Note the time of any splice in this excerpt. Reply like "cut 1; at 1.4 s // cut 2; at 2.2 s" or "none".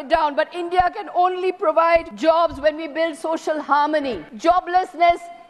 cut 1; at 2.1 s // cut 2; at 4.2 s